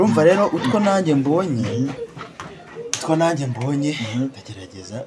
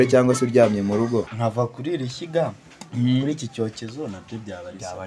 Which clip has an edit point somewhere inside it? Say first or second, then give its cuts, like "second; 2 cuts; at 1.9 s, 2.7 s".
second; 1 cut; at 1.4 s